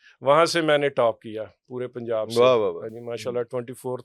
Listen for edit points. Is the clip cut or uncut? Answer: uncut